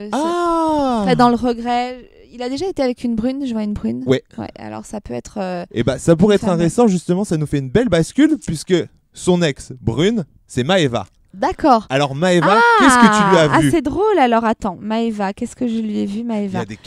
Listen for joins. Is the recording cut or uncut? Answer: uncut